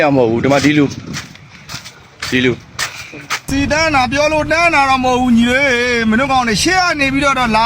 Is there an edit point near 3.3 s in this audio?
yes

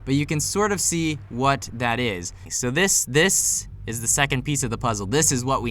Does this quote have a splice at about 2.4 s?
yes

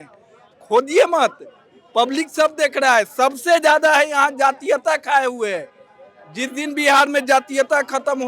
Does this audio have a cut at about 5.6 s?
no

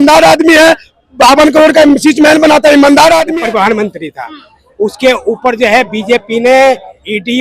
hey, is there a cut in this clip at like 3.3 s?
yes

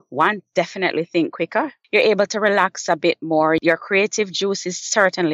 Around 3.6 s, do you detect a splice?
yes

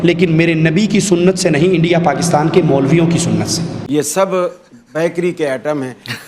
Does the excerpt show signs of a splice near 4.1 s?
yes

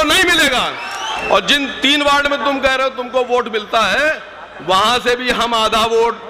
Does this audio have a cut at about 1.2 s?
yes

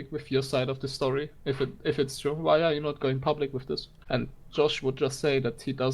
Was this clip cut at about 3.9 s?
yes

